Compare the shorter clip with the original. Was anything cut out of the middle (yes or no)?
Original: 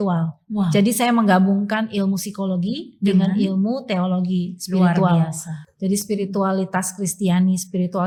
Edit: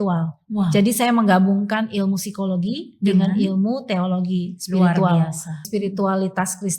yes